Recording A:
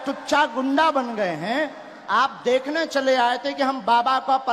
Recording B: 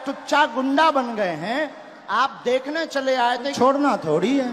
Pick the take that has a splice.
B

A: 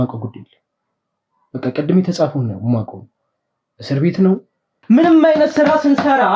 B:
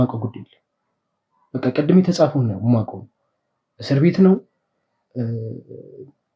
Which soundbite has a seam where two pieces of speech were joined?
A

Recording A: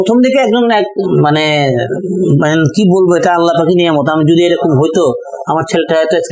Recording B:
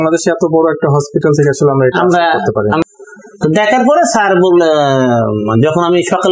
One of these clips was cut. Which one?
B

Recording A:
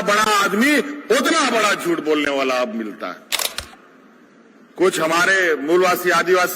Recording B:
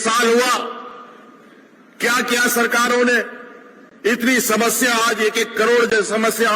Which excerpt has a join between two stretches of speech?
A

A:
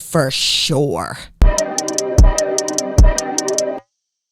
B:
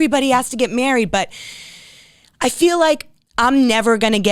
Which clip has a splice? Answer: A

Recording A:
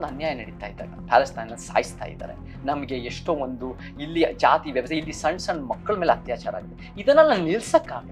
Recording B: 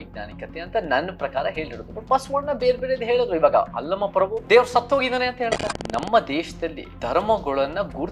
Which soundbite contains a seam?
B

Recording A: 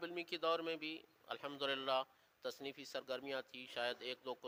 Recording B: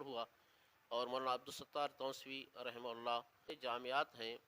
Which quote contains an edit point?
B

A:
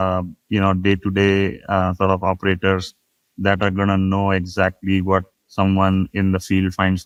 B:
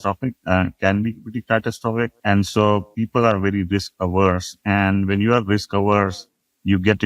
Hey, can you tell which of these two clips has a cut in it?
B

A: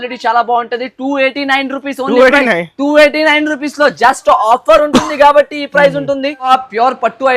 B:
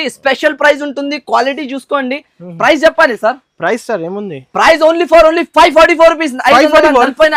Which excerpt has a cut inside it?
A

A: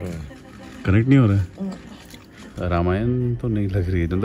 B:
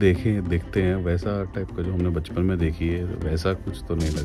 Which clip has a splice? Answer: A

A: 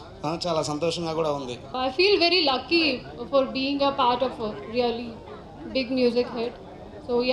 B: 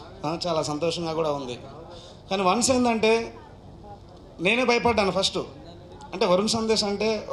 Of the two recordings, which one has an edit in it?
A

